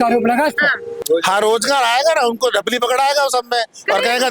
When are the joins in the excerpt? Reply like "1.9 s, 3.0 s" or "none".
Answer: 1.0 s

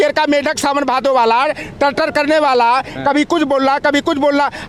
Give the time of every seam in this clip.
none

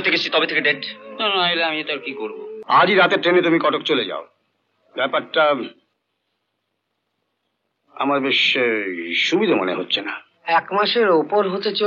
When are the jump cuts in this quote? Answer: 2.5 s

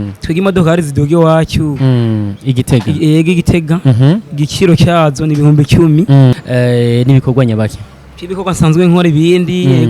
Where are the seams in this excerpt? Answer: 6.3 s

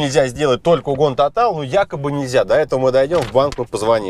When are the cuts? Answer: none

